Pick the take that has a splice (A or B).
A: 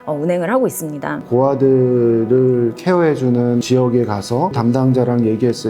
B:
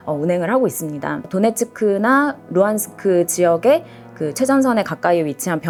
A